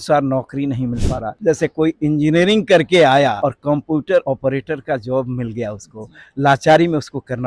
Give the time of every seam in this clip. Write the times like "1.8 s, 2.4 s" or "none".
1.3 s, 3.4 s, 4.2 s